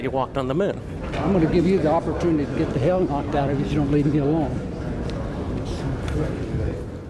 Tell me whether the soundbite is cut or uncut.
uncut